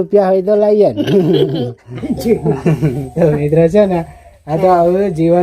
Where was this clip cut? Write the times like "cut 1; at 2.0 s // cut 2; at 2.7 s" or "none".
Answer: cut 1; at 2.0 s